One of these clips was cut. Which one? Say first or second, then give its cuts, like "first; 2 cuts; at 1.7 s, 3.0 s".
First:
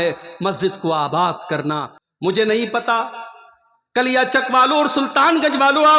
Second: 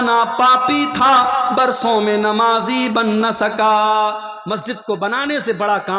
first; 1 cut; at 1.9 s